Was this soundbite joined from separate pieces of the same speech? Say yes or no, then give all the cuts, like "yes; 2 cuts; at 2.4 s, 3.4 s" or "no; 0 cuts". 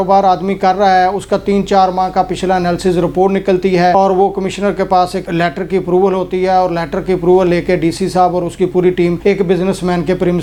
no; 0 cuts